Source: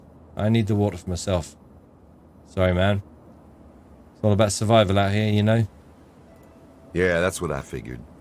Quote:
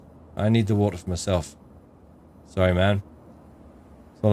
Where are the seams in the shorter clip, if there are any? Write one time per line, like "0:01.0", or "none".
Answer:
none